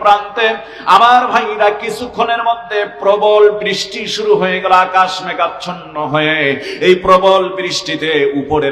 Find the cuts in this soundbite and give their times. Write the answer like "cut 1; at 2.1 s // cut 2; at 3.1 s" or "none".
none